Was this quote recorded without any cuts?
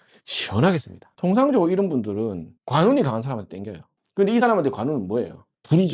no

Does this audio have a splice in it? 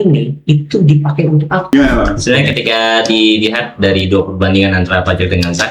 yes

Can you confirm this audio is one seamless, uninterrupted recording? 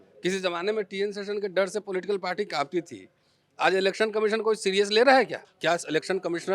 no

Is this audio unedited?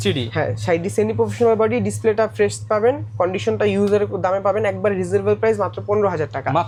yes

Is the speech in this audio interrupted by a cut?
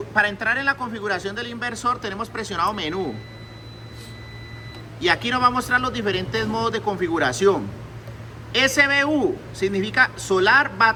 no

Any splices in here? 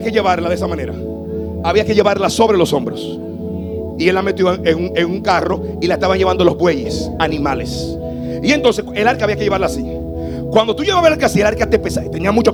no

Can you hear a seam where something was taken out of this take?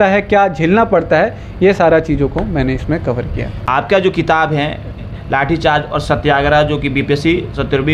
yes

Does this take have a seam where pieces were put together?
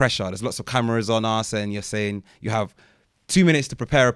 no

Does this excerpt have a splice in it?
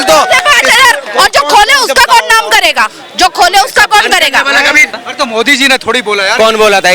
yes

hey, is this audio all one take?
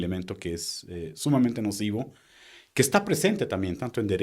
yes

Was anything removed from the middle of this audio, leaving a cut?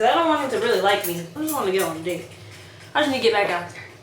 yes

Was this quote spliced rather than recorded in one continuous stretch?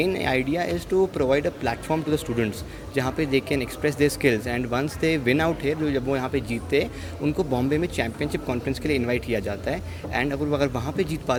no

